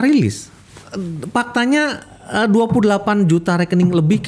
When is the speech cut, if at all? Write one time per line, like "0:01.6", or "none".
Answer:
none